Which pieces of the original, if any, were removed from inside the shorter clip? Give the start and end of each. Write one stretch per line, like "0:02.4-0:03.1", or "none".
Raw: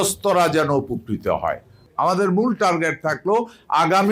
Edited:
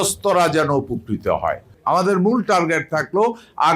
0:01.7-0:01.8